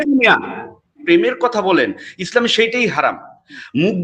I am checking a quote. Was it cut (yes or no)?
yes